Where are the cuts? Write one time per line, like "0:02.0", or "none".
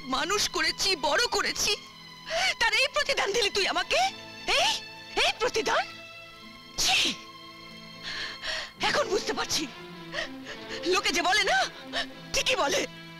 none